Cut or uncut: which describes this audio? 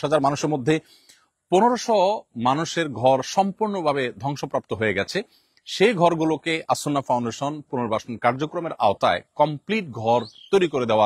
uncut